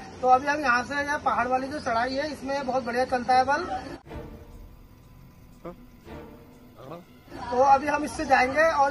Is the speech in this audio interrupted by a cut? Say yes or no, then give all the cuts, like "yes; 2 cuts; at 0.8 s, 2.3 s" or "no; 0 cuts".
no; 0 cuts